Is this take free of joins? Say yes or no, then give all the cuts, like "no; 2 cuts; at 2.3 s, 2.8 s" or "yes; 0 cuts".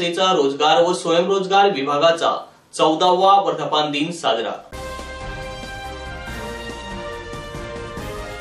yes; 0 cuts